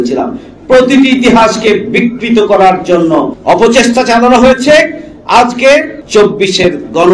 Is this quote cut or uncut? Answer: cut